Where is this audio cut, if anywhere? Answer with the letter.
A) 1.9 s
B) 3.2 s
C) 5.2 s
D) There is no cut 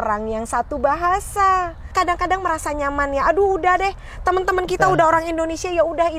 A